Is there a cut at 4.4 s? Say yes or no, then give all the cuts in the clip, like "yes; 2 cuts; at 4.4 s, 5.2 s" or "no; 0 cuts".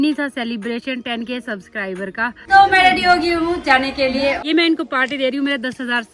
yes; 2 cuts; at 2.4 s, 4.4 s